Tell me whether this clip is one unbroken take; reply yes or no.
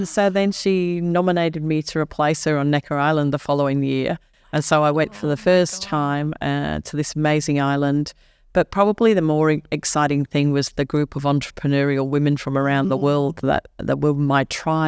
yes